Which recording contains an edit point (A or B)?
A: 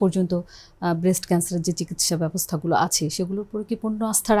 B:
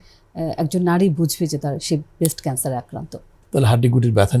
B